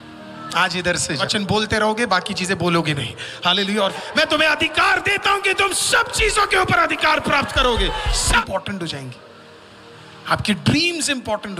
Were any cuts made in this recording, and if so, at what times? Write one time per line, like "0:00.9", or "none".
0:01.2
0:04.0
0:08.4